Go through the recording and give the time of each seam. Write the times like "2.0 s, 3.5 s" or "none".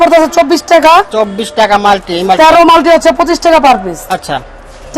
none